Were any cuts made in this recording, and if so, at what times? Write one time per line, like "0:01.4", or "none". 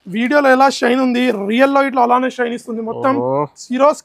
none